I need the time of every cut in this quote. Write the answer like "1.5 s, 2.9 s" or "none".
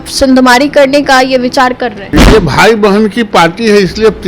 2.1 s